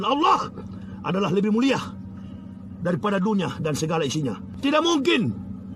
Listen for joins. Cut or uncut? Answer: cut